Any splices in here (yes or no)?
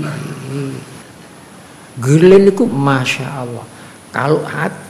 yes